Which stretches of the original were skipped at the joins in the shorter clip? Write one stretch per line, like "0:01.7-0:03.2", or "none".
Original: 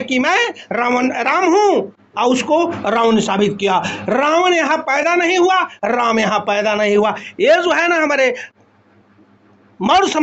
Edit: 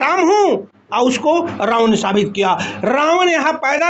none